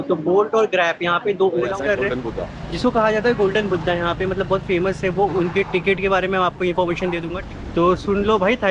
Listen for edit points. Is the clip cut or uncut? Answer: cut